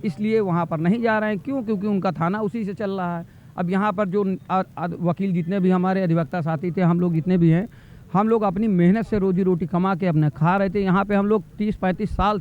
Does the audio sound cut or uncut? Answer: uncut